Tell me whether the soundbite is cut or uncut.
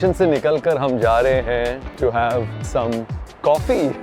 cut